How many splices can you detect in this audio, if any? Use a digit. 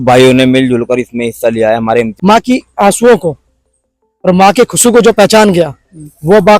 1